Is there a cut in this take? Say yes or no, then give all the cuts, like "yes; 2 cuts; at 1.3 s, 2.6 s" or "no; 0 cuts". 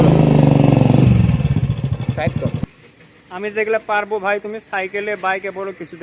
yes; 1 cut; at 2.7 s